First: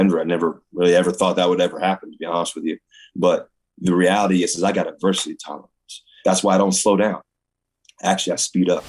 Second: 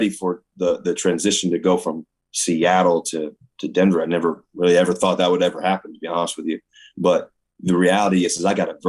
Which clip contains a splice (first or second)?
first